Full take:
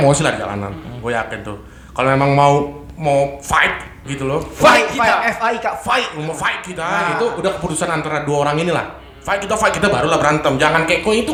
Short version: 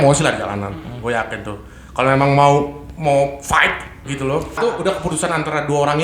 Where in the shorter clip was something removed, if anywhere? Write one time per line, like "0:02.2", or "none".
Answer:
0:04.6